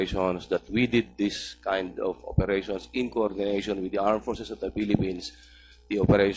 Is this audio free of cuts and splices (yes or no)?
no